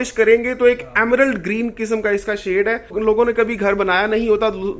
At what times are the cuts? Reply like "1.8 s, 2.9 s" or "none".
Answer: 2.9 s